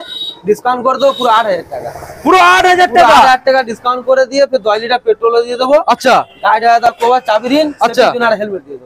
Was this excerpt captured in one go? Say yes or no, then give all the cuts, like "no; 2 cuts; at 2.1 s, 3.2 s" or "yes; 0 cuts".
yes; 0 cuts